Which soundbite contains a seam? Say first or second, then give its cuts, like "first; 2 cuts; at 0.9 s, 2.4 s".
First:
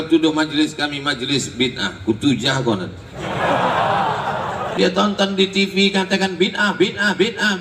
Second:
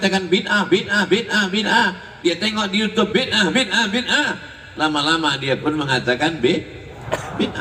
first; 1 cut; at 4.8 s